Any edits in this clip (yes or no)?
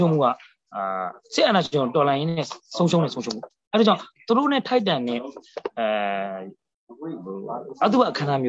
no